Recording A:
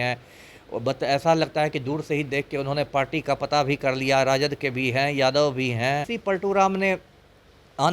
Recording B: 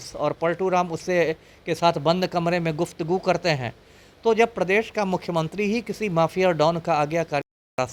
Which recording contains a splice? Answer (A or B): A